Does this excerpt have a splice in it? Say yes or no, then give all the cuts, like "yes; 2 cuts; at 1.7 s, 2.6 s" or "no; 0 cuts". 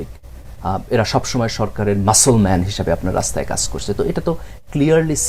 no; 0 cuts